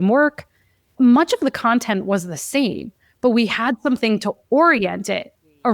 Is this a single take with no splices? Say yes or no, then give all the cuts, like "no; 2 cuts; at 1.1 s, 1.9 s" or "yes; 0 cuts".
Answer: no; 1 cut; at 1.0 s